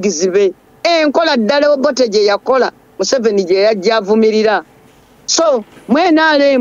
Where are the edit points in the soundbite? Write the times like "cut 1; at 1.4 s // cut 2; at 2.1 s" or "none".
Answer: none